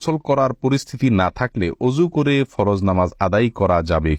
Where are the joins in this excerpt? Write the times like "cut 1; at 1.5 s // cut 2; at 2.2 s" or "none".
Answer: none